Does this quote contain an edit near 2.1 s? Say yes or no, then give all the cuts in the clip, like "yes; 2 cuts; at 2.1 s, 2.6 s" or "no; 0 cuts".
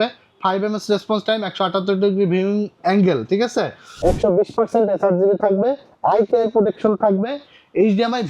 no; 1 cut; at 3.8 s